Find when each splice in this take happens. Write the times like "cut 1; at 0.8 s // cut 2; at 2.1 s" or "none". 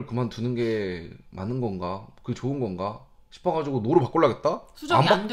none